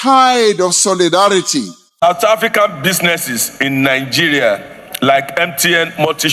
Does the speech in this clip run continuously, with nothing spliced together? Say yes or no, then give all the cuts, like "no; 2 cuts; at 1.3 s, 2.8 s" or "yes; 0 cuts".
no; 1 cut; at 2.0 s